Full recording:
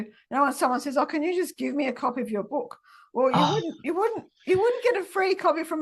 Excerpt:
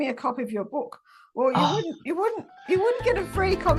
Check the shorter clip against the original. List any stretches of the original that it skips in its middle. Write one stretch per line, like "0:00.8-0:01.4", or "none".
none